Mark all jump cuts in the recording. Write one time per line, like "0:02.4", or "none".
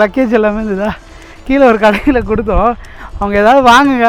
none